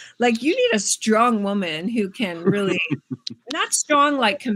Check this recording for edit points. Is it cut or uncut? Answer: uncut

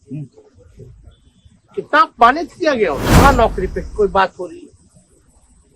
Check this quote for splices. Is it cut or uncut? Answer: cut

